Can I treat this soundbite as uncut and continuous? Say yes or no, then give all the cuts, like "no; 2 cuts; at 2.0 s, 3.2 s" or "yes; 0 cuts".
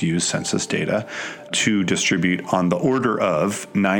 no; 1 cut; at 1.5 s